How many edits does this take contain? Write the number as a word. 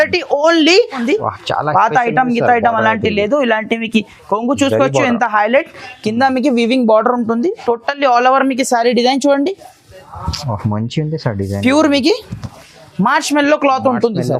one